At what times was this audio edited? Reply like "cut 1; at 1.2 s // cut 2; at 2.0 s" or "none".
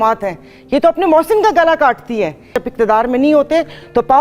cut 1; at 2.6 s